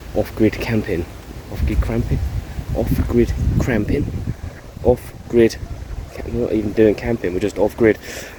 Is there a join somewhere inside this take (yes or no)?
no